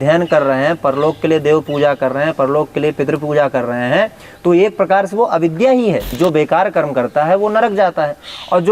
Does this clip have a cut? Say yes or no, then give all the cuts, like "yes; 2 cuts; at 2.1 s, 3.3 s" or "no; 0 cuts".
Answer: yes; 1 cut; at 6.1 s